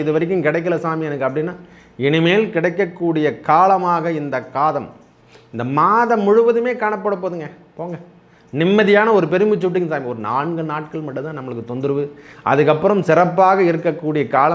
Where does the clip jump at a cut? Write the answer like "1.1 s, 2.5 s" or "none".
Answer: none